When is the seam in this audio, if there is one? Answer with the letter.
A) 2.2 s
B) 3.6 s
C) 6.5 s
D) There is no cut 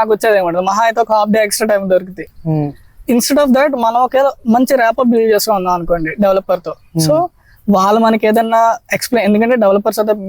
D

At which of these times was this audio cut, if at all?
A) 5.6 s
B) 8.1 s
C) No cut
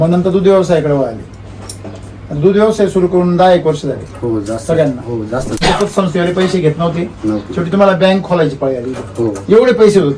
A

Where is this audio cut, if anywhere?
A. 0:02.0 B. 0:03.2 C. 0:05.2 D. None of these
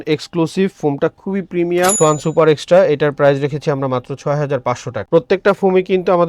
A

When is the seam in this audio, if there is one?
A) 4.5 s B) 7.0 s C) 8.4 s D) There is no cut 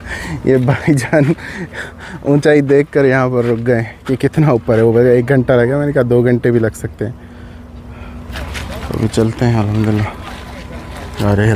C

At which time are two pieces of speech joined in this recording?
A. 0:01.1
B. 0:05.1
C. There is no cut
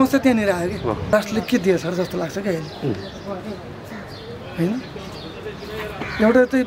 A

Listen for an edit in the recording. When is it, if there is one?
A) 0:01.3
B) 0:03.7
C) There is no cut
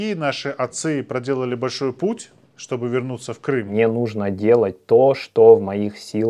B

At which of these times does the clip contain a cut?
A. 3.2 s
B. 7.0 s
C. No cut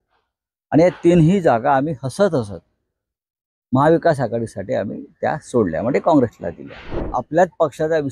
B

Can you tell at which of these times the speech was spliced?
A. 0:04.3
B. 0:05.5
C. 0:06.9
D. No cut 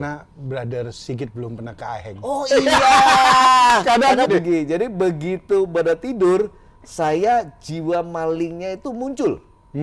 A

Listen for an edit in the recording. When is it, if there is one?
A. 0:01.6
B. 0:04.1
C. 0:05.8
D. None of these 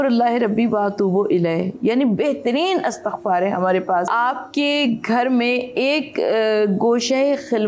B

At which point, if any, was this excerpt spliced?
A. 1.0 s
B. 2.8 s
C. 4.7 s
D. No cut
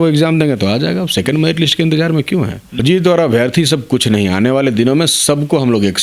B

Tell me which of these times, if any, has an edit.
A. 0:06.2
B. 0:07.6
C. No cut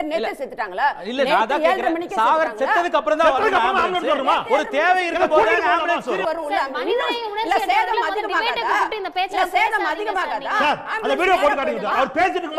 A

